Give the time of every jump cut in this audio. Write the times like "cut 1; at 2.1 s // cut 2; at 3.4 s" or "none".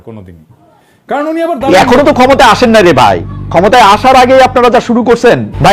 cut 1; at 1.7 s